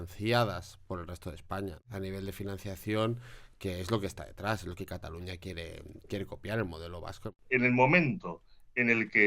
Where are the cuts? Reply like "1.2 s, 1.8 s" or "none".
1.8 s, 7.4 s